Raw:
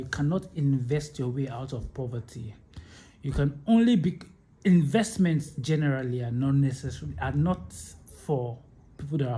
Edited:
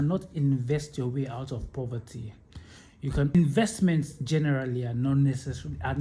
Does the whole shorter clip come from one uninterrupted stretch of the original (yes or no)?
no